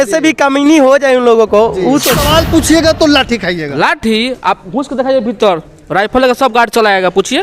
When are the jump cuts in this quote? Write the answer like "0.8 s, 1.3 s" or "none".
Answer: 2.2 s

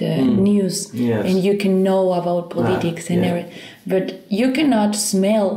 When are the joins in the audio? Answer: none

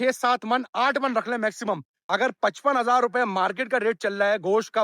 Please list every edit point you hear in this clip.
2.0 s

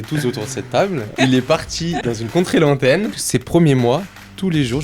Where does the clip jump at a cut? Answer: 1.1 s, 2.0 s, 3.2 s

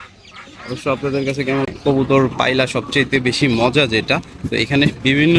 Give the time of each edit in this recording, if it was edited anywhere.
1.7 s

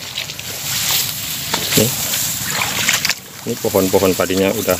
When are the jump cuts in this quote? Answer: 1.7 s

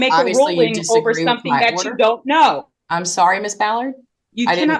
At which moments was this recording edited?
none

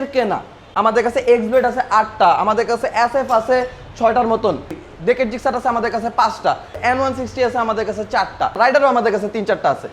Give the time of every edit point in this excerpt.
0.9 s, 4.8 s, 6.7 s, 8.8 s

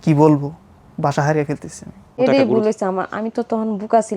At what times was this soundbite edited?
2.2 s

